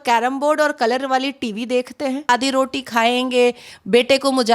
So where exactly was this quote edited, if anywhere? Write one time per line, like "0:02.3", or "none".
0:02.3